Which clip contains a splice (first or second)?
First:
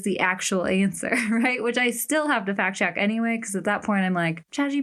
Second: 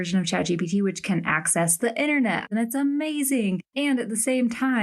second